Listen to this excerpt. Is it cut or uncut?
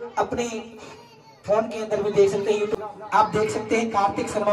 cut